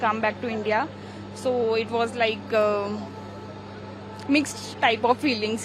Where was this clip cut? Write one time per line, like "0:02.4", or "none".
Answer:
none